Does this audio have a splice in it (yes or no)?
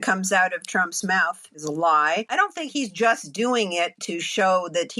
yes